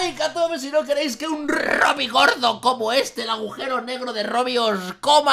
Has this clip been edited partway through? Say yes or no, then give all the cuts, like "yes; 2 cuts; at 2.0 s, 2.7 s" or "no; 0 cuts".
no; 0 cuts